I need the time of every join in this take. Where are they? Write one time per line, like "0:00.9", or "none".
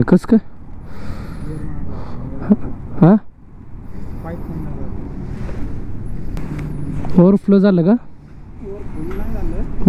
0:06.4